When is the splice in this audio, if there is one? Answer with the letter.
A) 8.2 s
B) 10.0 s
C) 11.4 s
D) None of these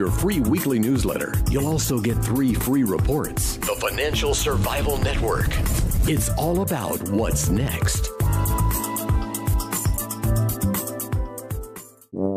B